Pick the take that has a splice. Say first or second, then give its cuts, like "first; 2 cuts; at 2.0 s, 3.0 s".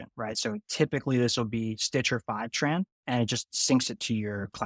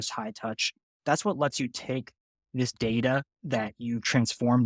first; 1 cut; at 3.0 s